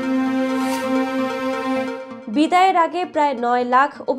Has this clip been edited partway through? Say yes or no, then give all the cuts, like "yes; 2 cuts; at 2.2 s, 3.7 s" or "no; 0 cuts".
yes; 1 cut; at 2.1 s